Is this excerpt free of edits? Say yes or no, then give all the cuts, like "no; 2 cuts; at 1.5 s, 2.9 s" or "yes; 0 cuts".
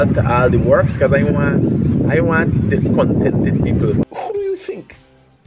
no; 1 cut; at 4.0 s